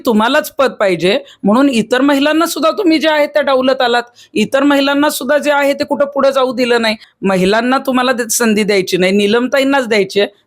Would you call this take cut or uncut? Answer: cut